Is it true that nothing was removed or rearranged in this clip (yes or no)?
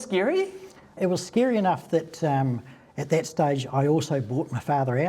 no